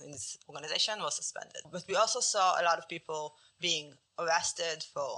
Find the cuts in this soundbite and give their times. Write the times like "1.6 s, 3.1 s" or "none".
1.6 s